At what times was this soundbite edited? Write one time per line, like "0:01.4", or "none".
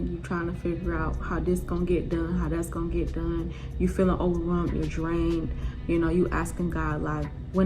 none